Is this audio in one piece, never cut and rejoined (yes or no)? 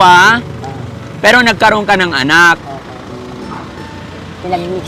yes